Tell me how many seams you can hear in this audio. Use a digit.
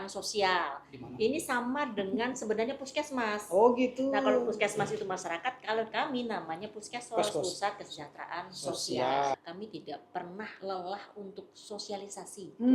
1